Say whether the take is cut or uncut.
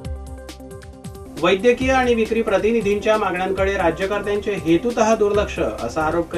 cut